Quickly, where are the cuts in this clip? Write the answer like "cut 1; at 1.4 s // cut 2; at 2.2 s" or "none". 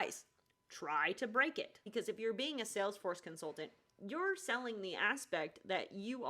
cut 1; at 1.8 s